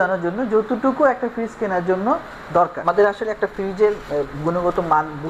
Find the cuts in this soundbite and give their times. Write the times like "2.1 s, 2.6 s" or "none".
2.8 s